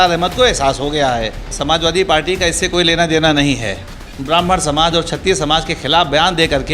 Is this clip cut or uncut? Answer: cut